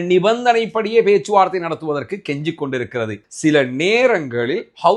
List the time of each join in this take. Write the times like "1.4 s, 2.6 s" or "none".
3.2 s

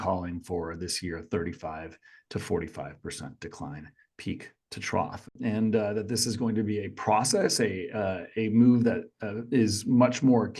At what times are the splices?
5.3 s

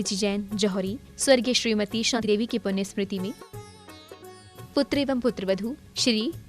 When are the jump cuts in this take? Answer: 2.2 s

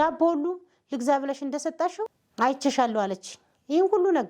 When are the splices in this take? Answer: 2.2 s

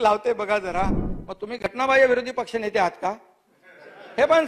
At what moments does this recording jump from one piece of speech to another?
1.1 s

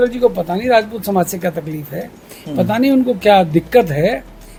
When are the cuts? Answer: none

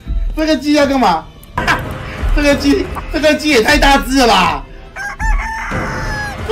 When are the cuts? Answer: 1.6 s

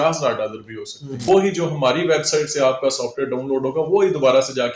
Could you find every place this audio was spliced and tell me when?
1.1 s

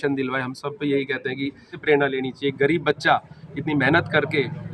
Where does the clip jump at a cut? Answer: 1.8 s

